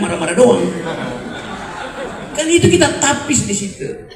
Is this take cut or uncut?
uncut